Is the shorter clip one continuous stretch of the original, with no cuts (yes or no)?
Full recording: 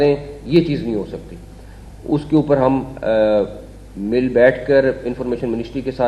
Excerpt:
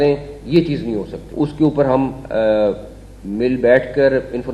no